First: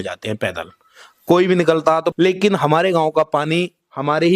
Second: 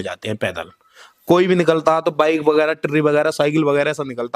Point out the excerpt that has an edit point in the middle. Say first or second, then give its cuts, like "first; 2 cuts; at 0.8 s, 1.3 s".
first; 1 cut; at 2.1 s